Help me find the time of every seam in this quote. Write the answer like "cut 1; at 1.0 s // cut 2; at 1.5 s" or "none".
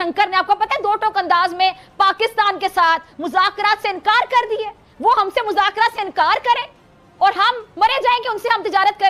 none